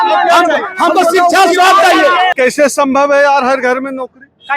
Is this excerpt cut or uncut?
cut